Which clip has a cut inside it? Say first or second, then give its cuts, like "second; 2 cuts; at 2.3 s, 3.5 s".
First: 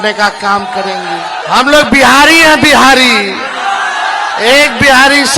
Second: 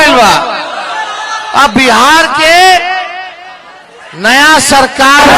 first; 1 cut; at 1.4 s